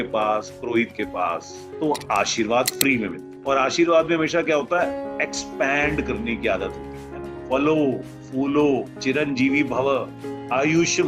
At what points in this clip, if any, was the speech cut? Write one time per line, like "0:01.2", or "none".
none